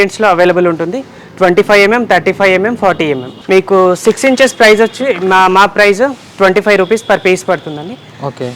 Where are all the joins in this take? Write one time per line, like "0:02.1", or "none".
0:03.3